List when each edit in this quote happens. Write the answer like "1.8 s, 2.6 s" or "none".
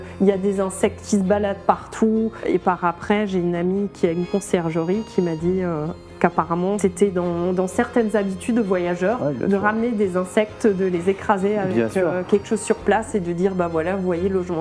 2.4 s